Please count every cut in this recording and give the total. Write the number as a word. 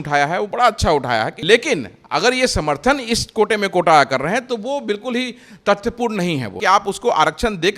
two